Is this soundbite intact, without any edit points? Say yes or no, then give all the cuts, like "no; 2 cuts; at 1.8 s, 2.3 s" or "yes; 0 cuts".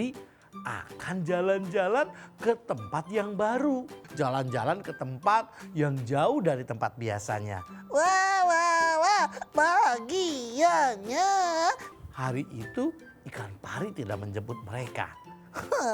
no; 2 cuts; at 4.0 s, 11.9 s